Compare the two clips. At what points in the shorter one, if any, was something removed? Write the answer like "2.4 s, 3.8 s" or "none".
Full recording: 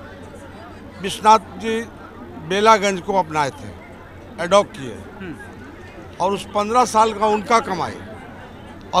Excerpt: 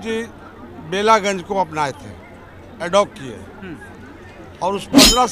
none